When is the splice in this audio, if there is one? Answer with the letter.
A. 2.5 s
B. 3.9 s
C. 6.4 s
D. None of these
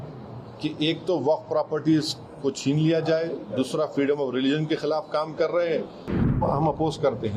C